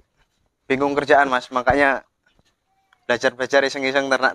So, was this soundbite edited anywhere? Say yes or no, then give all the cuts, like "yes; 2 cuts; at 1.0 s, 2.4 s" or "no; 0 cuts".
no; 0 cuts